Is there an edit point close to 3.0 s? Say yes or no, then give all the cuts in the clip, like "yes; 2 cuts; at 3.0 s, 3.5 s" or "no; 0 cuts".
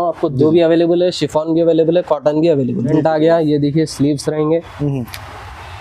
yes; 1 cut; at 3.0 s